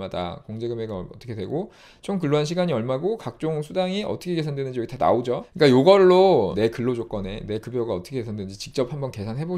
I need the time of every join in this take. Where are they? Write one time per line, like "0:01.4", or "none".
0:05.5
0:06.5